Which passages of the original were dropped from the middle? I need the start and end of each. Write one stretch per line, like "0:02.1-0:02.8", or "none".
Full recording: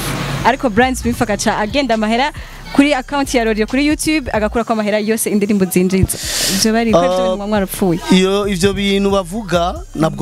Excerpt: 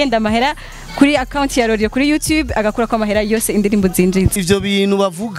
0:06.2-0:08.5